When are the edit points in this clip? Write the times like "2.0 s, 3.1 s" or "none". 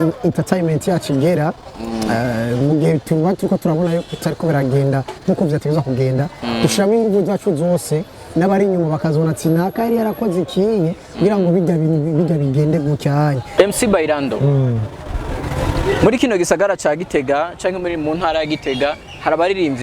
13.5 s

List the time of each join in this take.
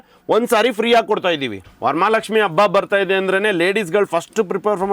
1.6 s

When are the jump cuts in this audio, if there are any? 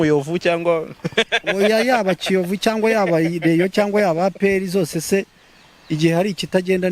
none

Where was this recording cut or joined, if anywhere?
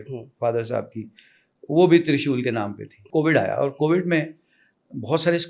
3.0 s

